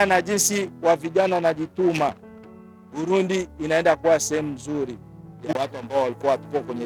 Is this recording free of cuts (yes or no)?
no